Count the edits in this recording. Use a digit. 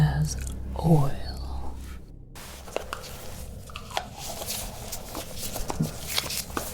1